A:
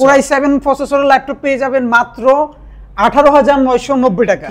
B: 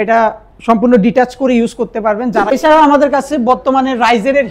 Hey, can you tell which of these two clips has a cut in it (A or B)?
B